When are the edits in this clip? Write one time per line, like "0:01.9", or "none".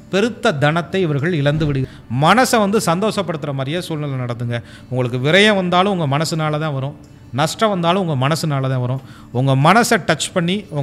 0:01.8